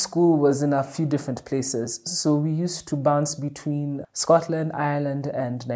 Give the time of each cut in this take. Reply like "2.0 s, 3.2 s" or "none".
none